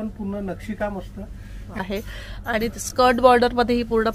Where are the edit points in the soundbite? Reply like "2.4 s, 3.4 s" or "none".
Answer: 1.8 s